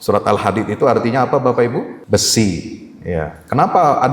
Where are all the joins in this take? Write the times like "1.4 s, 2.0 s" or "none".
2.0 s